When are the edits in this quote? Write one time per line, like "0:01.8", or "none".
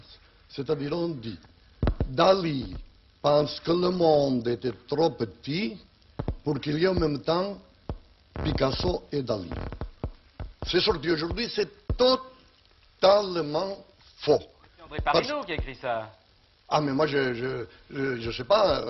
0:13.9